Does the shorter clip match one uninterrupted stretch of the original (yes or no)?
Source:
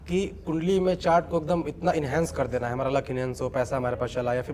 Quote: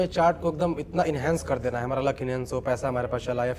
yes